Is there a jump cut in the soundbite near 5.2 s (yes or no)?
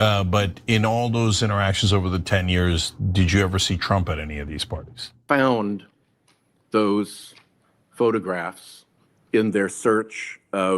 yes